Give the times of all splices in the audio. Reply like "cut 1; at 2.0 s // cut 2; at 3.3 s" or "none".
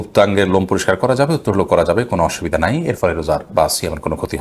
none